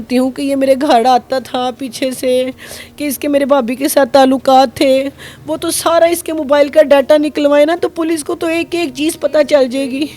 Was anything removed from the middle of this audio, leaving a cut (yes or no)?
no